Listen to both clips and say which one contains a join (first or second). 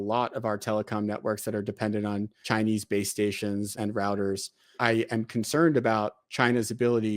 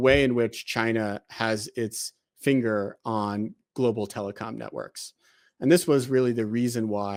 first